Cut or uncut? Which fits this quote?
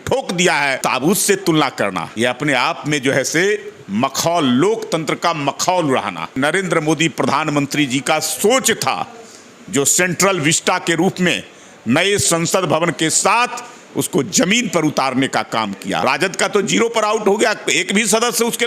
cut